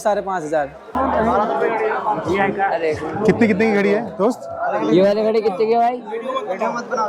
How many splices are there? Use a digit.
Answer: 1